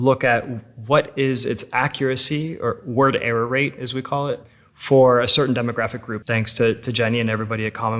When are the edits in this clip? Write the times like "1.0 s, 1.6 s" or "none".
6.1 s